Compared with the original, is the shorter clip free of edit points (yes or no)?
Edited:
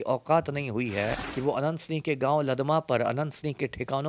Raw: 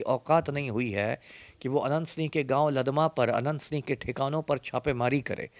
no